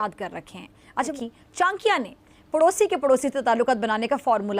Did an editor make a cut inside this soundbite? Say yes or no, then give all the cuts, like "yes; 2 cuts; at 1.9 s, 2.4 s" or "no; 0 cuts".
yes; 1 cut; at 1.1 s